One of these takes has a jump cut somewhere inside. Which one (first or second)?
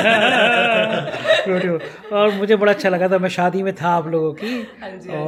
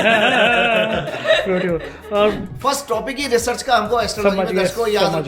second